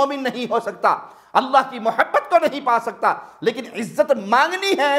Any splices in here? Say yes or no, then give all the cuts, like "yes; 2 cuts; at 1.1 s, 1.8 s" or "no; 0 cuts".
no; 0 cuts